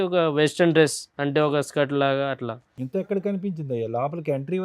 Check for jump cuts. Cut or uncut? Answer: uncut